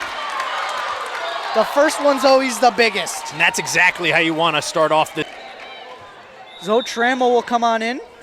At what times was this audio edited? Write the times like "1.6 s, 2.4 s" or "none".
5.3 s